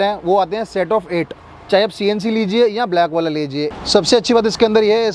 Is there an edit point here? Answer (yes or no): yes